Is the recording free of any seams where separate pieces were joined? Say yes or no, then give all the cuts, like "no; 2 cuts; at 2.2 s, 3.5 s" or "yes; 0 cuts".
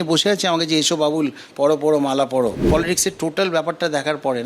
no; 1 cut; at 2.7 s